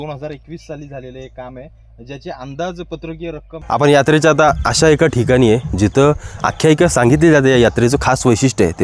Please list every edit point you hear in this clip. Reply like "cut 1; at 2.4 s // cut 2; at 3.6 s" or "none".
cut 1; at 3.5 s